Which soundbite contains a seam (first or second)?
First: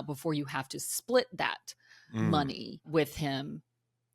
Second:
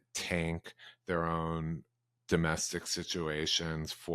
first